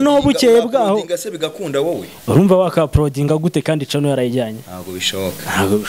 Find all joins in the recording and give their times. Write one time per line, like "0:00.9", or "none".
none